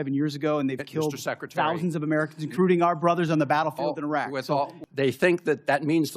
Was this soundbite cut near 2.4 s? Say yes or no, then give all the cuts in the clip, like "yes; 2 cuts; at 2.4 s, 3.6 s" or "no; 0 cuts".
no; 1 cut; at 4.8 s